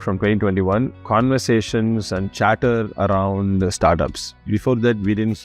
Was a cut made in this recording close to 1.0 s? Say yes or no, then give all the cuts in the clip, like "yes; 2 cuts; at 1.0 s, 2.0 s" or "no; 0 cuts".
yes; 1 cut; at 1.0 s